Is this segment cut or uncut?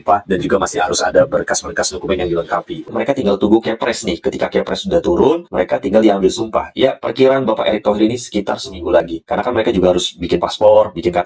cut